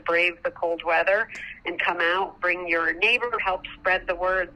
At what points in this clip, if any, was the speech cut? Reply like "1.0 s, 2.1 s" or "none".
3.4 s